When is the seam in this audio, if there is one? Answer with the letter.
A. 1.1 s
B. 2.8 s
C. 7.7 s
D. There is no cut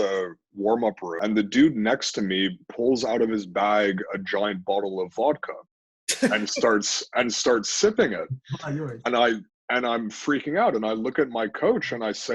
A